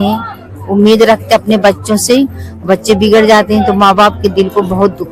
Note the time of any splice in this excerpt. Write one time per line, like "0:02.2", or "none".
none